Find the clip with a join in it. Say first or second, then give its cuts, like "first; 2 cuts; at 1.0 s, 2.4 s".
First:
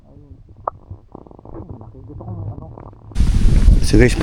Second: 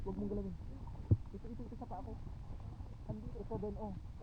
first; 1 cut; at 3.1 s